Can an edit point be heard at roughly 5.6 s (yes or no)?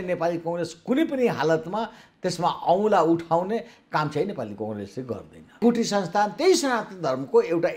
yes